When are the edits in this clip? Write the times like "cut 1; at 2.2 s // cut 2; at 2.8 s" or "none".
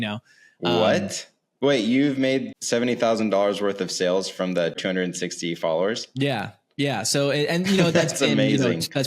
cut 1; at 2.6 s // cut 2; at 4.8 s